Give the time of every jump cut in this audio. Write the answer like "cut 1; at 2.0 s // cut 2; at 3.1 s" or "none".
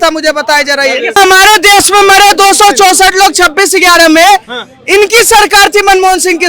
cut 1; at 1.2 s